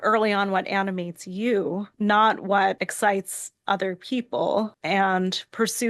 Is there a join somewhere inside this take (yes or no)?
yes